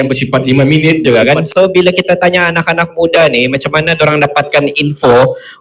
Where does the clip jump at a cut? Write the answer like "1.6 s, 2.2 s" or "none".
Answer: 1.3 s